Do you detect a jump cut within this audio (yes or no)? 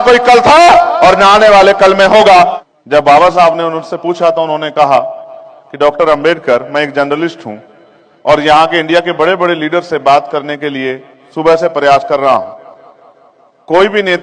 yes